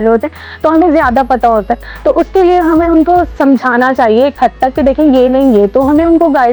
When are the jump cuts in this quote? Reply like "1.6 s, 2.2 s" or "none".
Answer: none

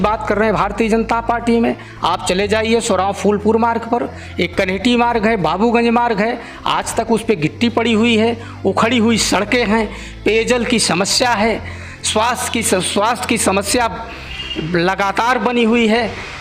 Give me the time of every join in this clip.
none

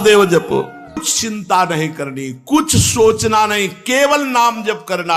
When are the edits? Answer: 1.0 s

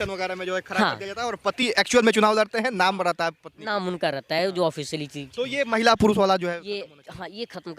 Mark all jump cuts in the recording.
none

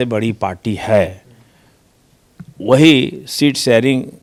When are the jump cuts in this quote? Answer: none

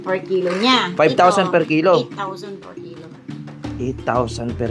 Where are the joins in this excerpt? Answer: none

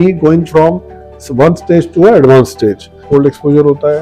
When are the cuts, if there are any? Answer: 3.0 s

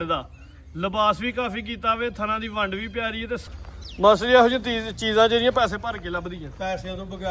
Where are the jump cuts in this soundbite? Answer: 3.4 s

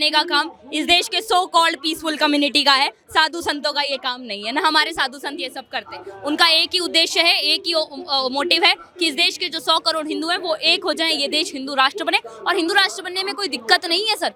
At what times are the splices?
none

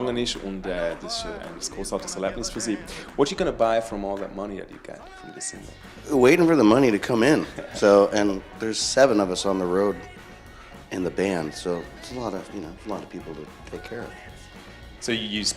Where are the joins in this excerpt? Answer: 12.8 s

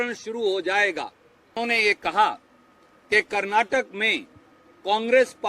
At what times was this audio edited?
1.5 s

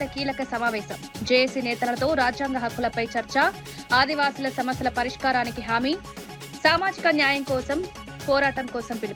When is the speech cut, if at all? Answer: none

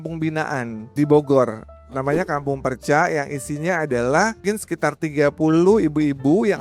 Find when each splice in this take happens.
0.9 s, 4.4 s

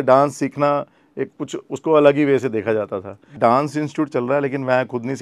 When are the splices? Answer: 3.3 s

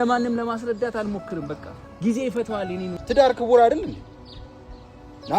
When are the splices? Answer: 3.0 s

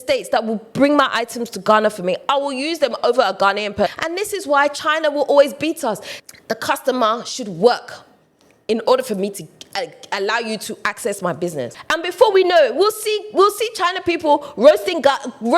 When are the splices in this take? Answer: 3.9 s, 6.1 s, 11.8 s

